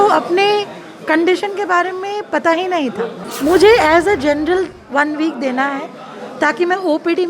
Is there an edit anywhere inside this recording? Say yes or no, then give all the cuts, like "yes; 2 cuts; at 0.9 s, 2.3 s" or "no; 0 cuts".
yes; 1 cut; at 3.2 s